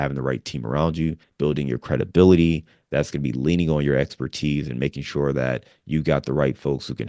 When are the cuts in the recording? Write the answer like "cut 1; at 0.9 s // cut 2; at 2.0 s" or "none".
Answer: none